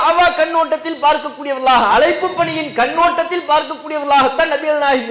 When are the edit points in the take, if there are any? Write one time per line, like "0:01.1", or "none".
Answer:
none